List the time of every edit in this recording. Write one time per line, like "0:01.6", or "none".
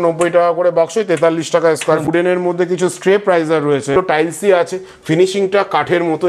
0:02.1
0:04.0